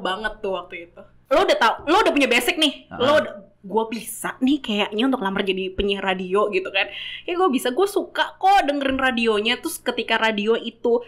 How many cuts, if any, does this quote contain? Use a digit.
1